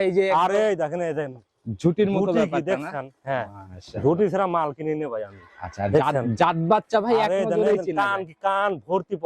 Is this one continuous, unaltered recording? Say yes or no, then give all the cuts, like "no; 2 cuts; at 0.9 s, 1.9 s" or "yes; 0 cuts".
yes; 0 cuts